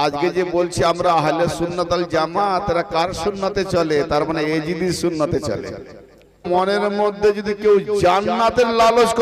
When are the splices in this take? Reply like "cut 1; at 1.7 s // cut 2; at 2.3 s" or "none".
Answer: cut 1; at 6.4 s